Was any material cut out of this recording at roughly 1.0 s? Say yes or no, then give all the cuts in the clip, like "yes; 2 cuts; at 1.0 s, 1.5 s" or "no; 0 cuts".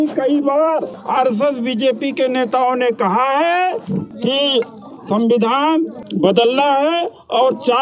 yes; 3 cuts; at 1.0 s, 4.1 s, 6.0 s